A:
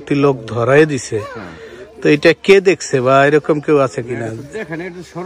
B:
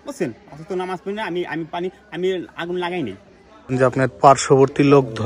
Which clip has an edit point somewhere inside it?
B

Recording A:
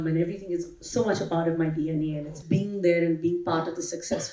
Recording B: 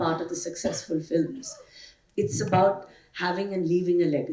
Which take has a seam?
A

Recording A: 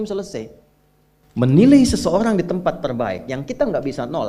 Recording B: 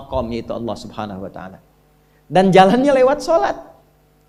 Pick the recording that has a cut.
A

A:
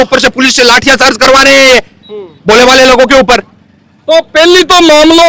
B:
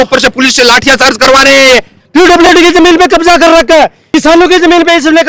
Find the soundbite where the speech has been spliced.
B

